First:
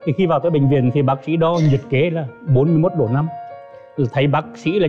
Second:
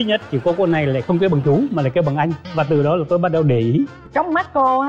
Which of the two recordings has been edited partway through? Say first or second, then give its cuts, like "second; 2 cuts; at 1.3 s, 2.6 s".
second; 2 cuts; at 2.4 s, 4.0 s